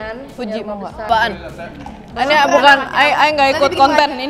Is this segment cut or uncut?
cut